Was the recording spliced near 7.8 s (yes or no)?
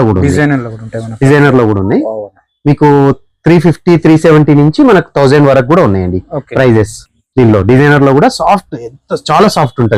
no